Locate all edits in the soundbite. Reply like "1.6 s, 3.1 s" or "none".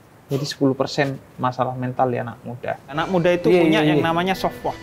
3.0 s